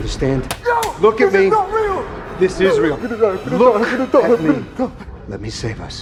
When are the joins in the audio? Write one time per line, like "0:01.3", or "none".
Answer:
none